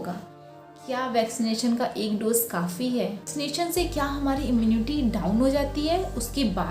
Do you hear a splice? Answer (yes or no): yes